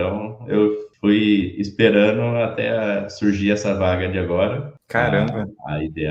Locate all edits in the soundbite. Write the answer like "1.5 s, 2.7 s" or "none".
0.9 s, 4.7 s